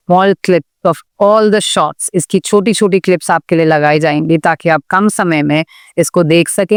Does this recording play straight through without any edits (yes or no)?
yes